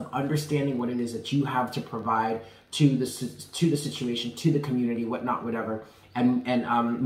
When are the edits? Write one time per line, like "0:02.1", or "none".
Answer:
none